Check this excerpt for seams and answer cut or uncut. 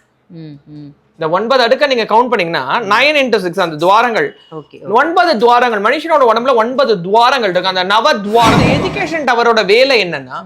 cut